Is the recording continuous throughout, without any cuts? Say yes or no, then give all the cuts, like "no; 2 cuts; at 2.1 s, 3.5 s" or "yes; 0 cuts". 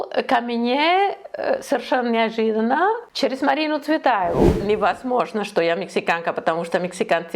no; 2 cuts; at 3.1 s, 4.6 s